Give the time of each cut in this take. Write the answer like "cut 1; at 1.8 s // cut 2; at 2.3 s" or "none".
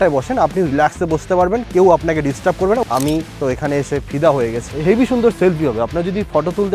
cut 1; at 2.8 s // cut 2; at 4.7 s